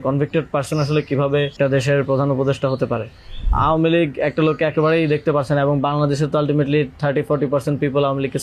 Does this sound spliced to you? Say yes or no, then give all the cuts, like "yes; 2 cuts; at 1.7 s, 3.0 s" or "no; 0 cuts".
yes; 2 cuts; at 1.5 s, 3.5 s